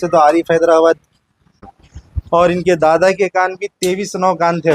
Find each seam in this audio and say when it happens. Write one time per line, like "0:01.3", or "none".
0:01.7